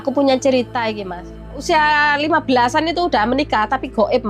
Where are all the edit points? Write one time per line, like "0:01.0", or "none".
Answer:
0:01.6